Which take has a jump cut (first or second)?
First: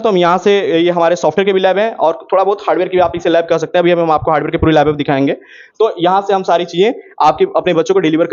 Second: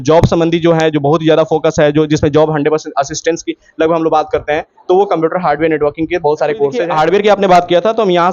second